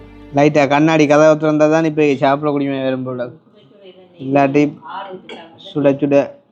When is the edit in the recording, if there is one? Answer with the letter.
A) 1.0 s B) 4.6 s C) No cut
C